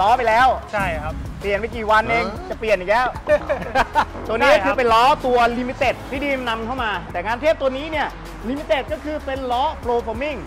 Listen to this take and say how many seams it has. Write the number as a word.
three